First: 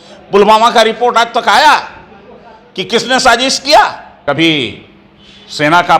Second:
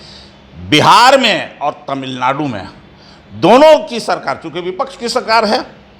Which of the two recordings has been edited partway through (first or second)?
first